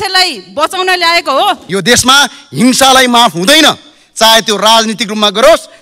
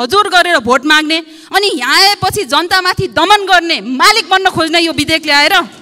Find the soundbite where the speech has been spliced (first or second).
first